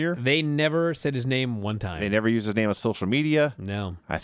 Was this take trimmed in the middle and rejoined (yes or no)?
no